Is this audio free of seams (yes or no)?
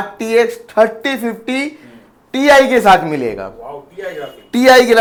yes